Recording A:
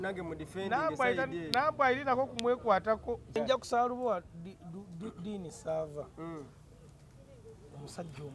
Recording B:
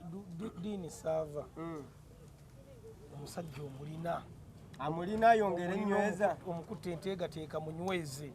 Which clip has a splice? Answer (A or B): A